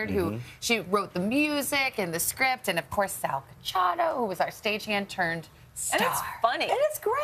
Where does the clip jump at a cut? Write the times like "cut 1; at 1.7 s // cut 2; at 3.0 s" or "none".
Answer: cut 1; at 3.4 s

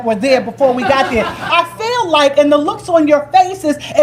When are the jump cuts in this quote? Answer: cut 1; at 1.5 s

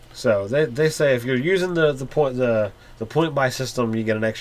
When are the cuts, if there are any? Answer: none

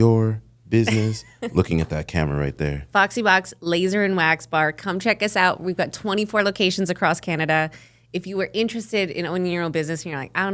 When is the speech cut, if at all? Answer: none

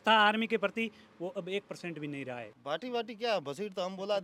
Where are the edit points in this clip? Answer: cut 1; at 2.5 s

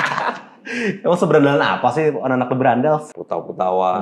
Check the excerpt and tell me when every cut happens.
cut 1; at 3.1 s

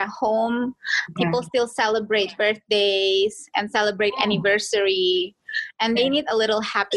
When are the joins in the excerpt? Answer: none

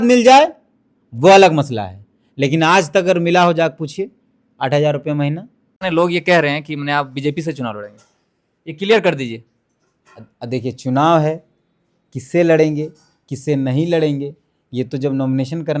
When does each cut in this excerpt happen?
cut 1; at 5.7 s

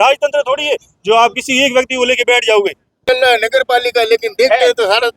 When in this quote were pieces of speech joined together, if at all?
cut 1; at 3.0 s

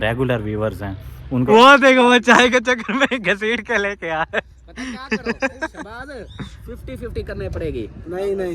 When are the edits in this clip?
cut 1; at 1.5 s

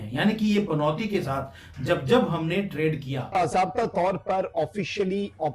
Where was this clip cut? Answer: cut 1; at 3.2 s

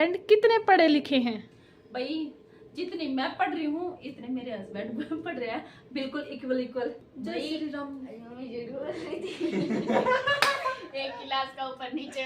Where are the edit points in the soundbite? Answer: cut 1; at 7.0 s

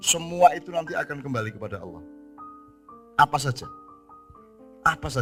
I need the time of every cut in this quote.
none

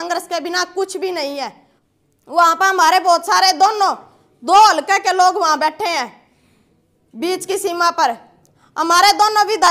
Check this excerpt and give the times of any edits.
cut 1; at 1.7 s

